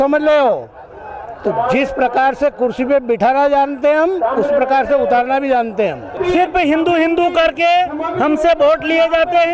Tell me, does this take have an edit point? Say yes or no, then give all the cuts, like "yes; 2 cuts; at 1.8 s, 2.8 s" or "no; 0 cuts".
yes; 1 cut; at 6.2 s